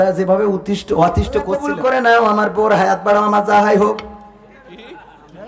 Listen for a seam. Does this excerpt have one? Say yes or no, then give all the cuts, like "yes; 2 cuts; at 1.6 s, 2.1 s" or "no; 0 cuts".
yes; 1 cut; at 1.6 s